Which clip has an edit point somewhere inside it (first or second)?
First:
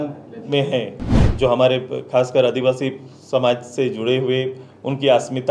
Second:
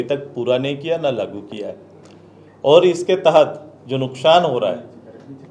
first